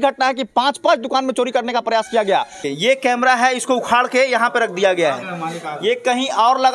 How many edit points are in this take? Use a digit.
1